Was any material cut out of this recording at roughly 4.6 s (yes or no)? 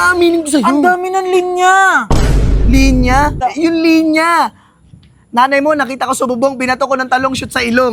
no